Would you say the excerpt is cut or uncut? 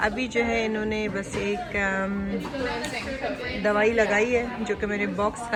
uncut